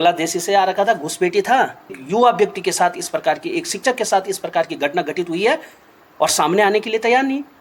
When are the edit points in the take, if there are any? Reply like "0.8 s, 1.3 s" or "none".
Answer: 2.0 s